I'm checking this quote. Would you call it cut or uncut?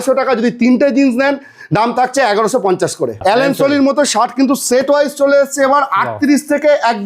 cut